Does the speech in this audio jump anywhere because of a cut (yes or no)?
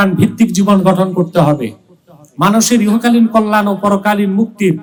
no